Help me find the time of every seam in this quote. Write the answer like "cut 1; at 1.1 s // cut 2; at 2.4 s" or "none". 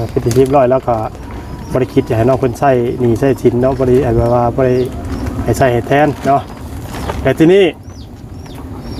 none